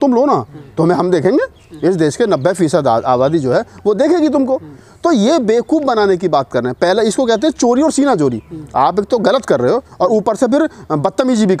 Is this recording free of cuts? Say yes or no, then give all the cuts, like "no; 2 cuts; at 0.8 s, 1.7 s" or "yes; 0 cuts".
yes; 0 cuts